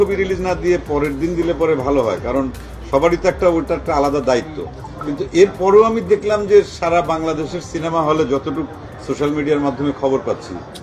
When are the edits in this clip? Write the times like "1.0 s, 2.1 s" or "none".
none